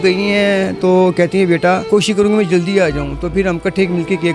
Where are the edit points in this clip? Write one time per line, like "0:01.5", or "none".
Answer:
0:01.8